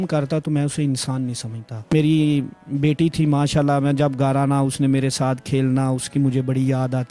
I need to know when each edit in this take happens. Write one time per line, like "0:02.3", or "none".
0:01.9

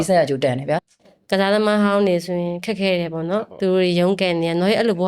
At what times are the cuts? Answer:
0:00.9

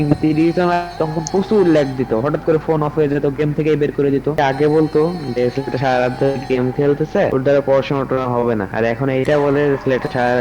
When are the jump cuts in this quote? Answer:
0:04.4
0:07.3
0:08.7

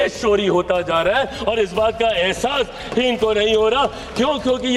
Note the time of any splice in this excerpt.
none

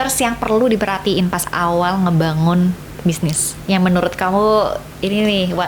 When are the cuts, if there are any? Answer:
none

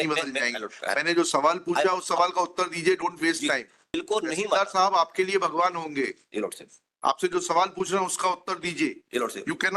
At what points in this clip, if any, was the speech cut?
0:03.9

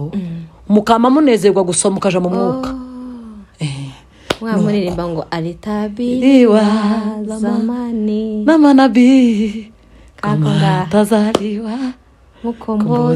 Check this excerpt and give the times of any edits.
none

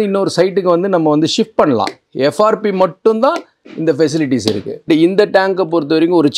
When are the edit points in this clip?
0:02.0
0:04.9

